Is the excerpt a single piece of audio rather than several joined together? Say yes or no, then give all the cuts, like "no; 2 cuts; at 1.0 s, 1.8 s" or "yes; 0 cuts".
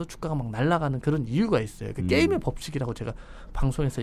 yes; 0 cuts